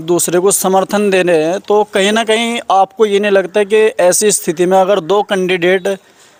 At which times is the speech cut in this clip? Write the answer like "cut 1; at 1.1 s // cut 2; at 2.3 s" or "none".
none